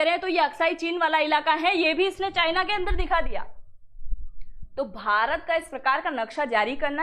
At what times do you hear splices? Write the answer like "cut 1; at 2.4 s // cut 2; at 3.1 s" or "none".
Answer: none